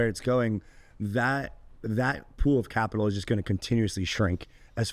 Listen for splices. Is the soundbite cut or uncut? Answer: uncut